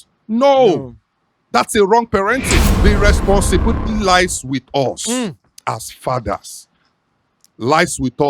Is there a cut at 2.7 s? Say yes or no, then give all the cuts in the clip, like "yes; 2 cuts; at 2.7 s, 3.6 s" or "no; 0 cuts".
yes; 1 cut; at 2.7 s